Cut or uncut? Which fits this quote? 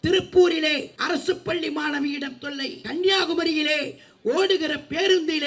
cut